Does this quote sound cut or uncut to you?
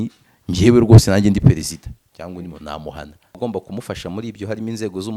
cut